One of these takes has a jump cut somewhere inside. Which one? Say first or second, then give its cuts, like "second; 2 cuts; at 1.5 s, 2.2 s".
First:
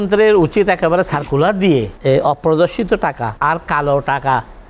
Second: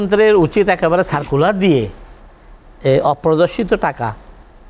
first; 2 cuts; at 1.9 s, 3.3 s